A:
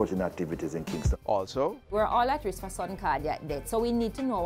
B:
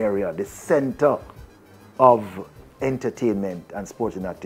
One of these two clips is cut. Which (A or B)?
A